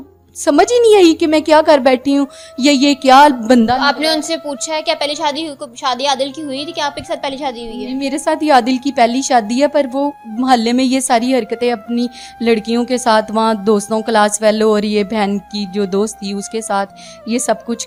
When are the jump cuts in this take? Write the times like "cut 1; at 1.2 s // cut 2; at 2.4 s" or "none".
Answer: none